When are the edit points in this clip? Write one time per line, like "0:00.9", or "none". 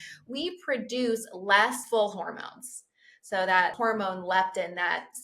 0:01.8
0:03.7